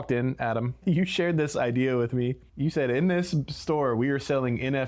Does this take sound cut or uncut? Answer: cut